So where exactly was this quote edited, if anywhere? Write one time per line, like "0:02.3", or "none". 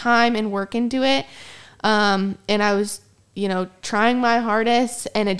none